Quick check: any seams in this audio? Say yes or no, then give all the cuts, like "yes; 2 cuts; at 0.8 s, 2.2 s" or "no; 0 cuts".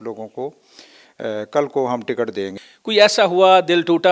yes; 1 cut; at 2.6 s